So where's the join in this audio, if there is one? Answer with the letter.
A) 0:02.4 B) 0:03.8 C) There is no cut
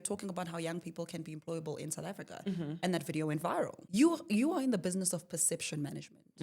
B